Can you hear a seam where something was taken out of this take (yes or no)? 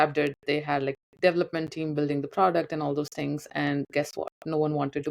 no